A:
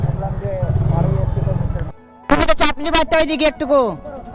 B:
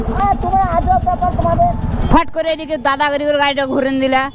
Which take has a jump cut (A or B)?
A